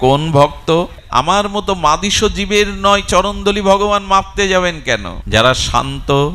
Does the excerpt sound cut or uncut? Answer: cut